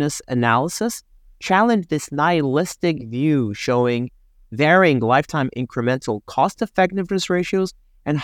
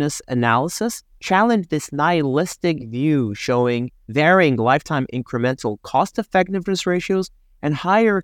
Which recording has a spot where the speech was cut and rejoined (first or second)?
second